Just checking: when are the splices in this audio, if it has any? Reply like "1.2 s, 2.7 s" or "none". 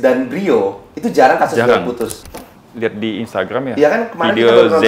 2.2 s